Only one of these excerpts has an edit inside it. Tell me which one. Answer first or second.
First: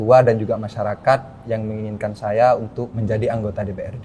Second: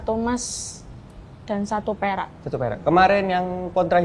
first